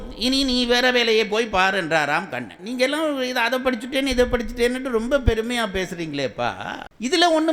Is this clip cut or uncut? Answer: cut